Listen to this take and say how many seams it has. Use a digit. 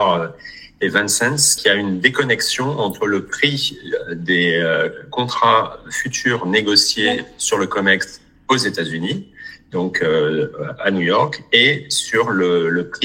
1